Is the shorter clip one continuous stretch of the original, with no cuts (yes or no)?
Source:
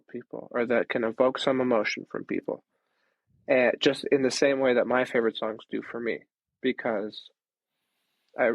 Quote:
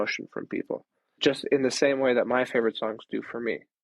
no